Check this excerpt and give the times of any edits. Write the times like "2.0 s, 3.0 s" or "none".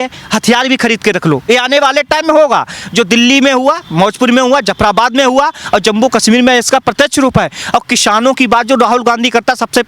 none